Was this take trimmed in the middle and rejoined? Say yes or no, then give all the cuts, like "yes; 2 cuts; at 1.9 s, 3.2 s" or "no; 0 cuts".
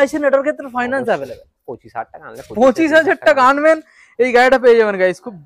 no; 0 cuts